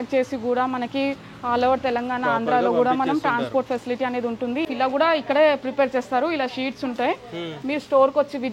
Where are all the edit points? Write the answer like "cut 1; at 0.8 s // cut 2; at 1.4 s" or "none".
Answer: cut 1; at 4.7 s